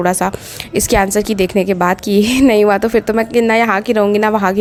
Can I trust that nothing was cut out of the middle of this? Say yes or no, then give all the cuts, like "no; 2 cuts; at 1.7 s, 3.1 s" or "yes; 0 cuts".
yes; 0 cuts